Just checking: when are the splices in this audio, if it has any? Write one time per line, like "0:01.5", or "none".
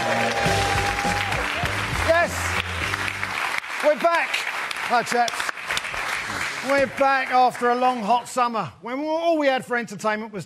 none